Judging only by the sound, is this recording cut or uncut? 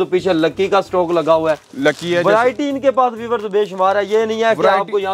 uncut